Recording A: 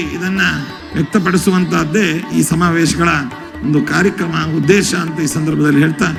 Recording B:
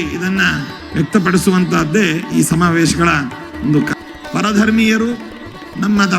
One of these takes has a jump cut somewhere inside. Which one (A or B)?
B